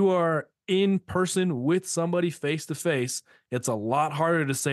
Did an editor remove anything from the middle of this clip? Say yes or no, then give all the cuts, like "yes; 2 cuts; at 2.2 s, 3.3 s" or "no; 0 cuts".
no; 0 cuts